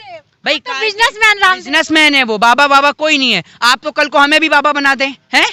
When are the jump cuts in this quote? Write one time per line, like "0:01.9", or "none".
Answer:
none